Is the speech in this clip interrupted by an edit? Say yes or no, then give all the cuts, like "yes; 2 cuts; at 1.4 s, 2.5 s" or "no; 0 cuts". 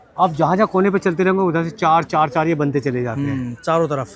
no; 0 cuts